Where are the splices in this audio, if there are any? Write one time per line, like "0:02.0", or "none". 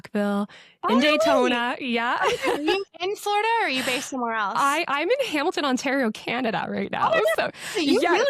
none